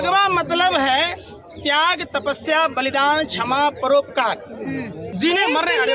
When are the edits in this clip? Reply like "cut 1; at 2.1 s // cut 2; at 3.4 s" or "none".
cut 1; at 5.0 s